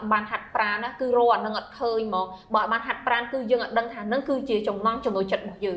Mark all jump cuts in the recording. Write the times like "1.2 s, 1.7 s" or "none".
none